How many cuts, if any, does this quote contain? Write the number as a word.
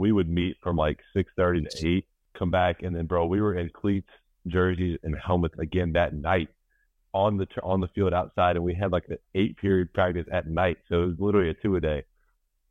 one